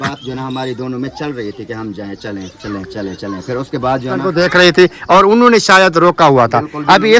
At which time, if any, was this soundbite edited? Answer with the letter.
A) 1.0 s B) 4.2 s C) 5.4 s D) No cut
B